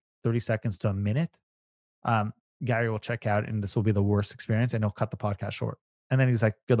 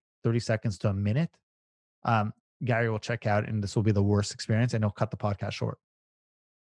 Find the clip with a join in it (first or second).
first